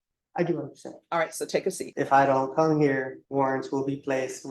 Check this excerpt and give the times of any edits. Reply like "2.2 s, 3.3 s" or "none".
1.9 s, 3.2 s